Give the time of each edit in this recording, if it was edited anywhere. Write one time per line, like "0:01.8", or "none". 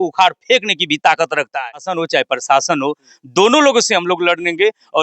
0:01.9